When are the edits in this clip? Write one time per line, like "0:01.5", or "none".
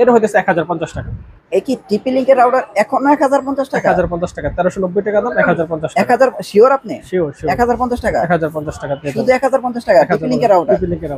none